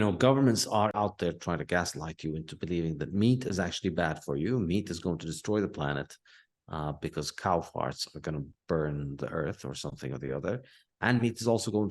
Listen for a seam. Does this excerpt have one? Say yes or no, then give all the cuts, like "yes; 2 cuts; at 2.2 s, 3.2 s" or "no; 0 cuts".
yes; 1 cut; at 0.9 s